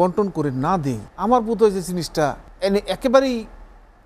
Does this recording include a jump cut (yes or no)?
yes